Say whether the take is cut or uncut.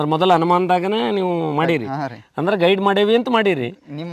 uncut